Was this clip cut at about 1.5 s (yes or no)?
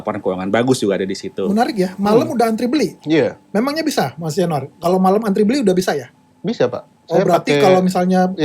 yes